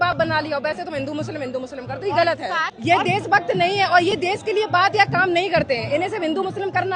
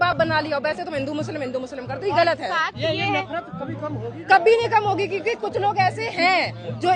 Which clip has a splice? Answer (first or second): first